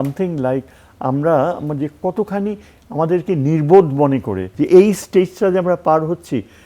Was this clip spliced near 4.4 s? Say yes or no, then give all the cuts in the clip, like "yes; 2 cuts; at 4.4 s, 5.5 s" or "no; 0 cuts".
yes; 1 cut; at 4.4 s